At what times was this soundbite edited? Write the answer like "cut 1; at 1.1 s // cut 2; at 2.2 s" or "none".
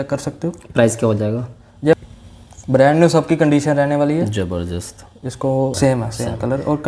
cut 1; at 1.9 s // cut 2; at 5.7 s